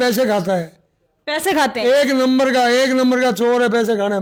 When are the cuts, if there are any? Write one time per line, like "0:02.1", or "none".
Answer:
none